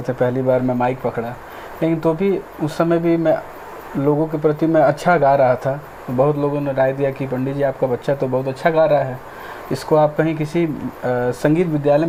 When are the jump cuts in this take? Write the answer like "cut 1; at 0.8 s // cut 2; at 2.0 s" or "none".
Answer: none